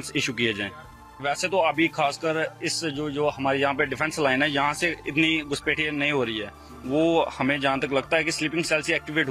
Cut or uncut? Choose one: cut